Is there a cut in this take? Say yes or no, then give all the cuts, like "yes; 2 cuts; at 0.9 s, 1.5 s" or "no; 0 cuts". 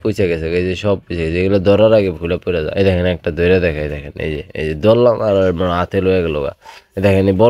no; 0 cuts